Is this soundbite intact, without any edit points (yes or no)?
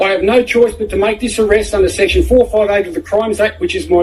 yes